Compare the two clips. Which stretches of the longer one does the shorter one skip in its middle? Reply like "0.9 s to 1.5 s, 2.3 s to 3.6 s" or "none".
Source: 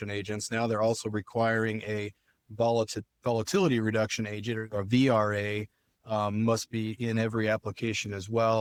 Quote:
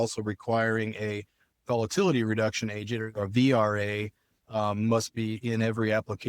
2.4 s to 3.0 s